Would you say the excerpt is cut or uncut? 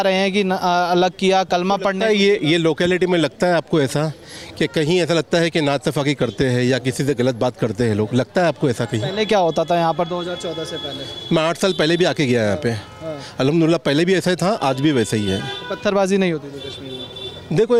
uncut